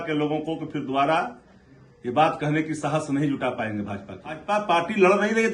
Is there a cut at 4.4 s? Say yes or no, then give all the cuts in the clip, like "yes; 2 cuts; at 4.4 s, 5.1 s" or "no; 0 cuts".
yes; 1 cut; at 4.4 s